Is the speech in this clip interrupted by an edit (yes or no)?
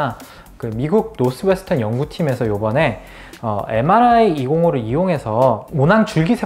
no